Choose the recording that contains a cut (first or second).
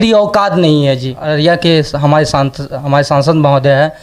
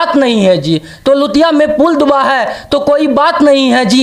first